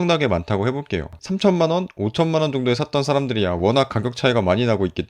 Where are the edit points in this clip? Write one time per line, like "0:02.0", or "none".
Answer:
0:01.1